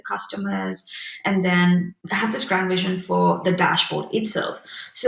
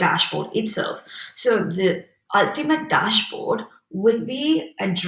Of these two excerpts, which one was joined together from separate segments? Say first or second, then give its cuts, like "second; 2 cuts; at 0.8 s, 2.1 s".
first; 1 cut; at 2.0 s